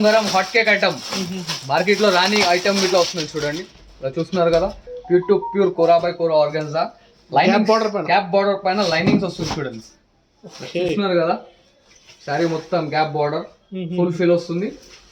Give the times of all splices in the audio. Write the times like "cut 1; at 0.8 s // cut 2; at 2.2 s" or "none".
none